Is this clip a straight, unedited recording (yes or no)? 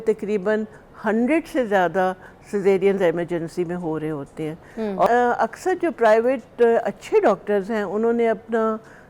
no